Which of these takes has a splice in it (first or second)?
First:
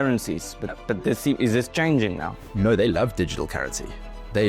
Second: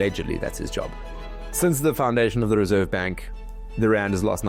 first